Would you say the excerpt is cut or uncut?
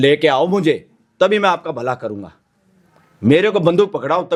uncut